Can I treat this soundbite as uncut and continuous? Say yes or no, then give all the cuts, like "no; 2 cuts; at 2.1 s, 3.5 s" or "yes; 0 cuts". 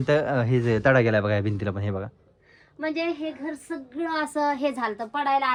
yes; 0 cuts